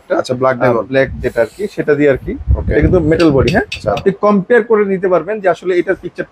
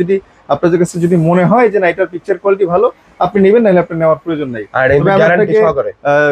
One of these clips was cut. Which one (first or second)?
first